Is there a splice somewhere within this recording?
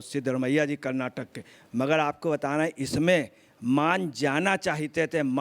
no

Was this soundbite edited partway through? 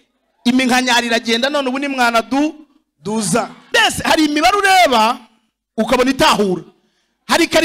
yes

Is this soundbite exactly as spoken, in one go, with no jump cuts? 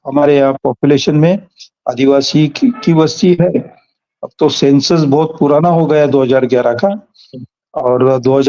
yes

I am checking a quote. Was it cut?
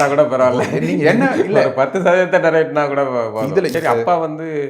yes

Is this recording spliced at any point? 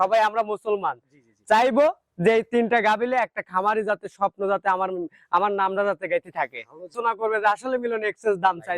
yes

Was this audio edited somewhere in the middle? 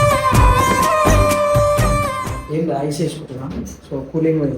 no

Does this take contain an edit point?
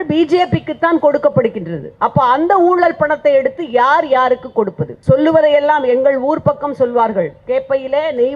yes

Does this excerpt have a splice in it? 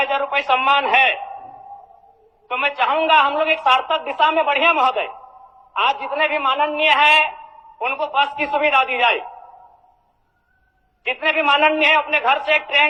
no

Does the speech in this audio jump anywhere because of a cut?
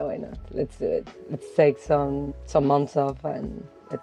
yes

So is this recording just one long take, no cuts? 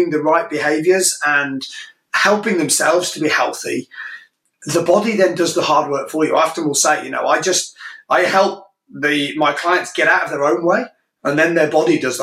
yes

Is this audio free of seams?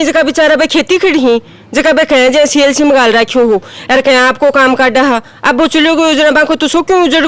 yes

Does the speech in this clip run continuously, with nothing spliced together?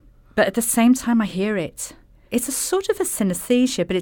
no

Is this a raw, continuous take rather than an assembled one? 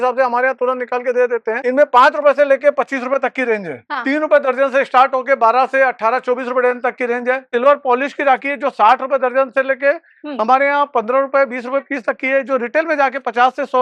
no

